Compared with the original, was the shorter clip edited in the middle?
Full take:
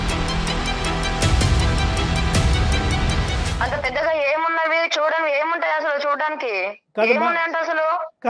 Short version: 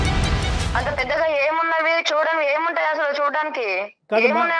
no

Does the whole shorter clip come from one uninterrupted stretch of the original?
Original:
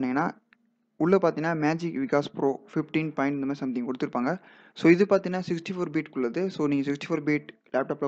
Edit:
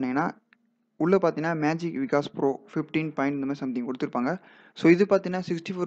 yes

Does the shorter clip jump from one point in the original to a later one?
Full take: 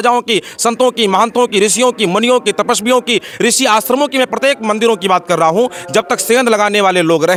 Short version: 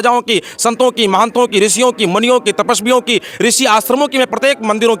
no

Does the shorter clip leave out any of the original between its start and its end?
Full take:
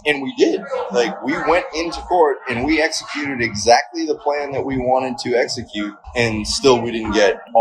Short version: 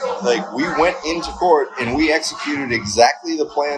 no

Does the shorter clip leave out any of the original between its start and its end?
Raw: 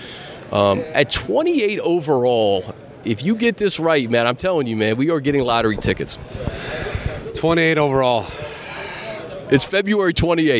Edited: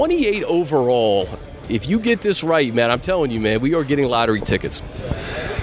no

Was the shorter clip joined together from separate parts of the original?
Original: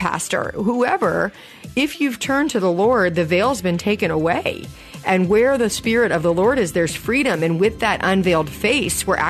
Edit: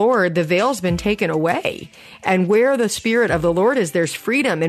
no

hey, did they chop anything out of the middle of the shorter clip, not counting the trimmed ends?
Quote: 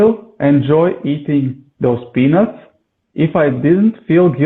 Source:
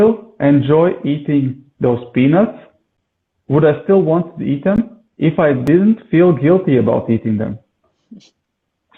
yes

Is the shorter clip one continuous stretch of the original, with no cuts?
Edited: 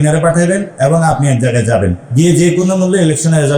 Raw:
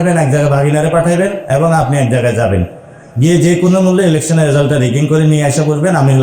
no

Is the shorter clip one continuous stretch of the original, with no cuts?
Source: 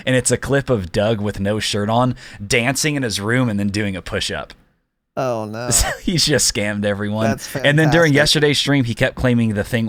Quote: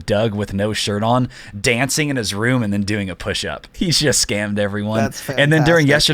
no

